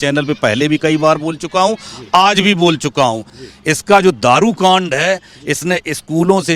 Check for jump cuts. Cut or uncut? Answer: cut